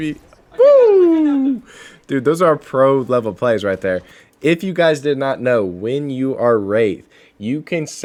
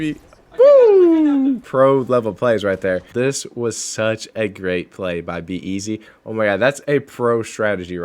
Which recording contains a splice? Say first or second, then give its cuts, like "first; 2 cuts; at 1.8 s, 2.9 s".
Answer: second; 2 cuts; at 1.7 s, 3.1 s